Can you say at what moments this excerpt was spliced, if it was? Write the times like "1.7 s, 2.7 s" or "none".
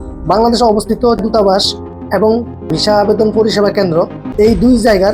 1.2 s, 2.7 s, 4.2 s